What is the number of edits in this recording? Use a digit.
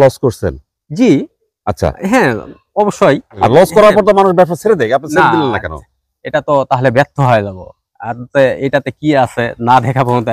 1